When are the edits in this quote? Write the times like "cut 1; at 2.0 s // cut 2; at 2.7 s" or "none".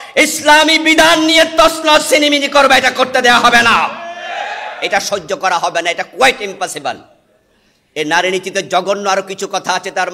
none